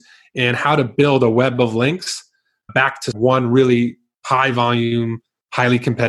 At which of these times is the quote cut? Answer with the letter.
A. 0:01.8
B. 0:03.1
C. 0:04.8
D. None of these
B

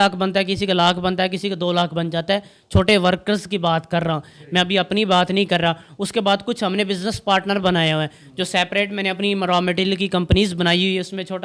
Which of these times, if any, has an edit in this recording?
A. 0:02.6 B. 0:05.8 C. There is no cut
C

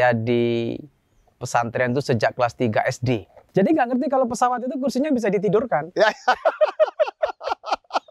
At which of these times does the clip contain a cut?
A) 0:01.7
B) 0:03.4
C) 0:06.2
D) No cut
B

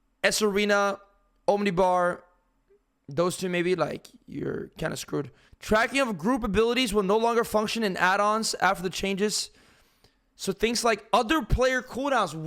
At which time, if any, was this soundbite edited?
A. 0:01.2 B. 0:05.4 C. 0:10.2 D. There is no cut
B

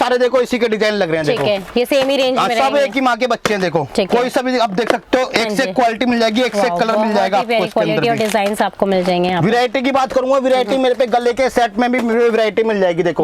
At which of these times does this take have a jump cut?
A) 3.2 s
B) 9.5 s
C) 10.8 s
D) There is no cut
D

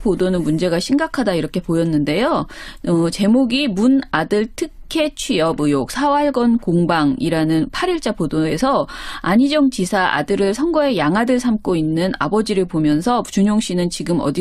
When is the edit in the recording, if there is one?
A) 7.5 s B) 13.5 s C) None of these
A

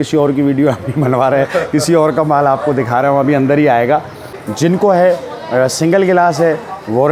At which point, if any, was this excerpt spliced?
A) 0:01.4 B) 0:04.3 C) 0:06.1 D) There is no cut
B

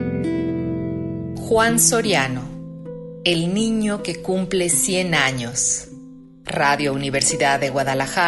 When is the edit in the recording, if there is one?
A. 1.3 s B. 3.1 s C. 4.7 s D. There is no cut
A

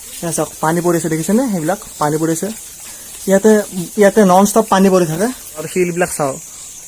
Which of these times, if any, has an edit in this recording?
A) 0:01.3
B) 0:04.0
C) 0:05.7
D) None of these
C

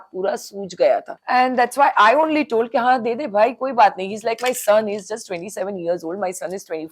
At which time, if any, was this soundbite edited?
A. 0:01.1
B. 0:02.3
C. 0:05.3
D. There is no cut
A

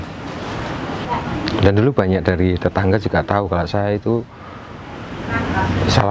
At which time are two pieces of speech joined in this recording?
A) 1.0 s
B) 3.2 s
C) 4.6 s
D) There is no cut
A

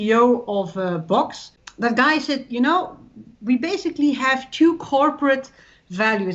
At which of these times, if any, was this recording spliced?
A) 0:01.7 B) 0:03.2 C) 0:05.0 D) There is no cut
A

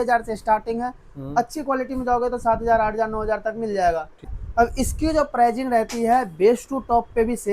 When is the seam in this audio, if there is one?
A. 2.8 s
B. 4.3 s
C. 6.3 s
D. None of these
B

